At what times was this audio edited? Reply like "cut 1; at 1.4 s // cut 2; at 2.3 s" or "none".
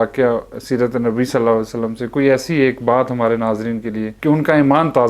cut 1; at 4.1 s

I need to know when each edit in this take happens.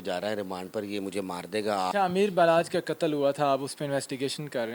cut 1; at 1.9 s

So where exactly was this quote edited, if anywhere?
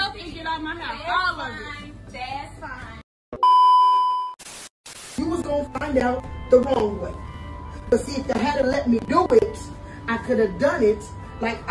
none

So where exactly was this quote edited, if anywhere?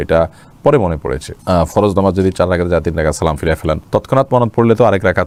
none

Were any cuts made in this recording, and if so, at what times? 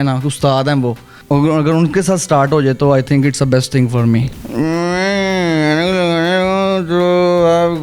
cut 1; at 1.1 s // cut 2; at 4.4 s

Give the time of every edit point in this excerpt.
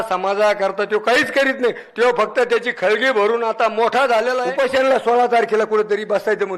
cut 1; at 4.5 s

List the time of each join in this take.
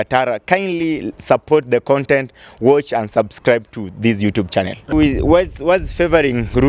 cut 1; at 4.9 s

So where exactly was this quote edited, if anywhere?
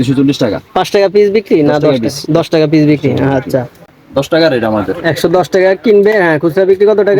cut 1; at 3.9 s

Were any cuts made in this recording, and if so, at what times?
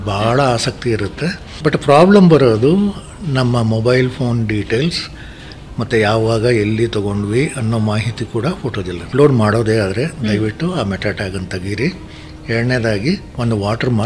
cut 1; at 1.5 s // cut 2; at 9.1 s

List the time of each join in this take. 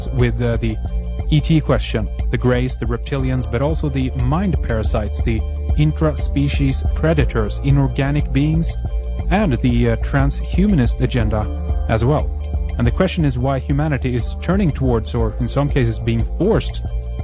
cut 1; at 3.1 s

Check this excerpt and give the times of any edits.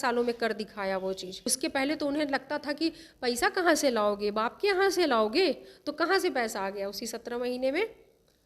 cut 1; at 1.4 s

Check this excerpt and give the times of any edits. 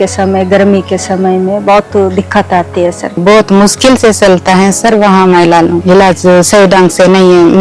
cut 1; at 3.2 s // cut 2; at 5.8 s

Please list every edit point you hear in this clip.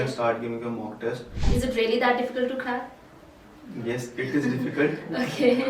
cut 1; at 1.4 s

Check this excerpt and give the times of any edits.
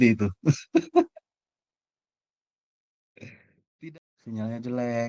cut 1; at 3.7 s

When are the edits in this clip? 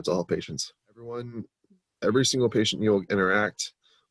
cut 1; at 1.0 s

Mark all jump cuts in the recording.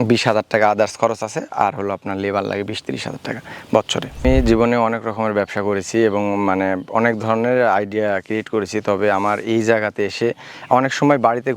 cut 1; at 4.2 s

